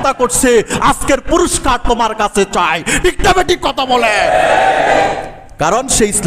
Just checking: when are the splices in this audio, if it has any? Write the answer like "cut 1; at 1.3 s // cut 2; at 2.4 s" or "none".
none